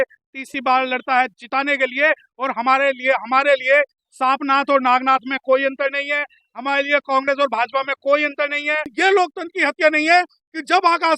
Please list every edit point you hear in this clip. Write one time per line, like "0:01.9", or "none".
0:08.9